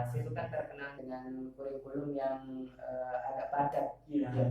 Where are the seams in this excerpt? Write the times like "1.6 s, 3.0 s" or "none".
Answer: 0.9 s